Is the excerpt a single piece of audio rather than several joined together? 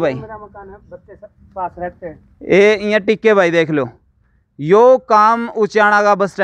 yes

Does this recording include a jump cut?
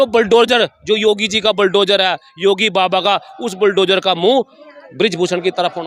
no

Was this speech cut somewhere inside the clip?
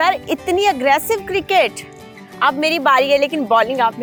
no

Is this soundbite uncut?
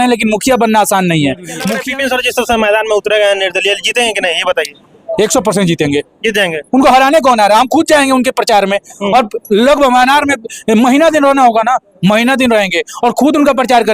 no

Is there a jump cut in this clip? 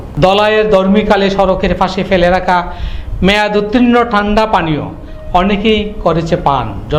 no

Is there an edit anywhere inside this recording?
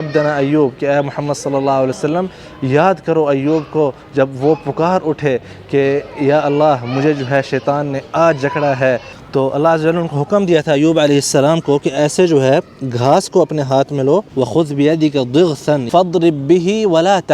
yes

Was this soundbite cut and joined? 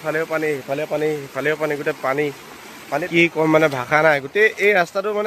yes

